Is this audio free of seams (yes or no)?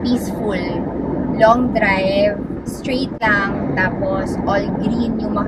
yes